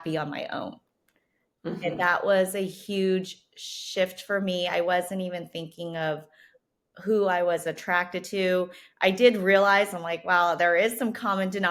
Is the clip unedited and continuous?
yes; 0 cuts

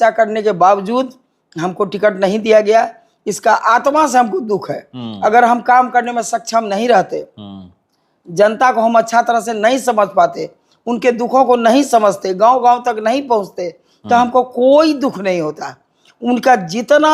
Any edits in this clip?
no; 0 cuts

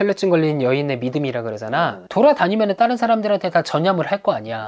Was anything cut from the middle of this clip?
yes; 1 cut; at 2.0 s

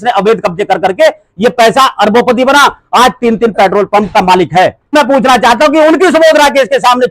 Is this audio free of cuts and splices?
no; 1 cut; at 4.9 s

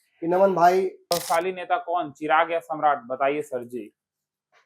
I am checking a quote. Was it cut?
yes; 1 cut; at 1.1 s

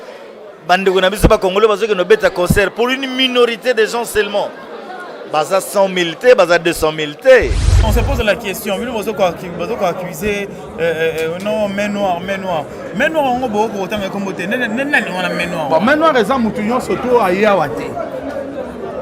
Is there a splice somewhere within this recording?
yes; 1 cut; at 7.9 s

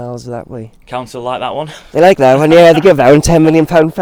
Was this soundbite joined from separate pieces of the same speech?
no; 0 cuts

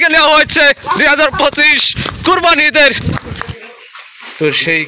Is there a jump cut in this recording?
yes; 1 cut; at 3.4 s

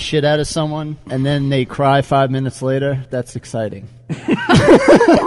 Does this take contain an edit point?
yes; 1 cut; at 3.6 s

